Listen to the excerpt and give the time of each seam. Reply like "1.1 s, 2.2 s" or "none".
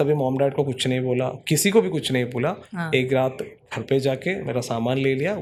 none